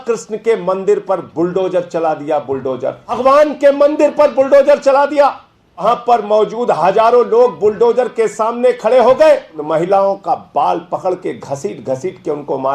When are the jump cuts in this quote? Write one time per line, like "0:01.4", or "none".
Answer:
0:03.1
0:05.8
0:09.6